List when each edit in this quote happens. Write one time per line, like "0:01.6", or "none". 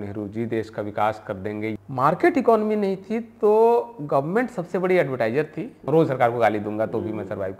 0:01.8
0:05.8